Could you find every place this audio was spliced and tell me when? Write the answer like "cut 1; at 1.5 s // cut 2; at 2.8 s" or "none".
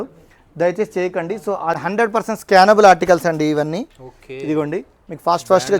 cut 1; at 1.8 s